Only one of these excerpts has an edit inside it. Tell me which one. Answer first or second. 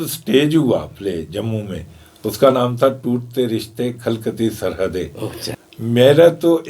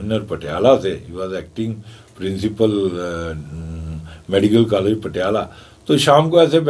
first